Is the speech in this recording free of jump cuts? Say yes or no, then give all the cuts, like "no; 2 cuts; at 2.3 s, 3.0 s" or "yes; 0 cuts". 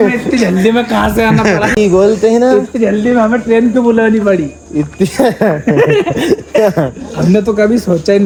yes; 0 cuts